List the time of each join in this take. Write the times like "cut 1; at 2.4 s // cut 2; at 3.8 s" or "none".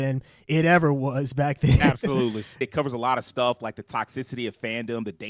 cut 1; at 2.6 s